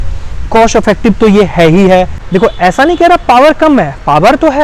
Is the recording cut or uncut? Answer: cut